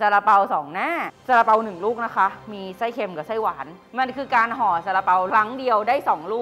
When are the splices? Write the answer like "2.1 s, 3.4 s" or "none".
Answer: 1.1 s, 3.8 s, 5.3 s